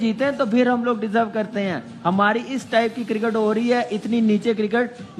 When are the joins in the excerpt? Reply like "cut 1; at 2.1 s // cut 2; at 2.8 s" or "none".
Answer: none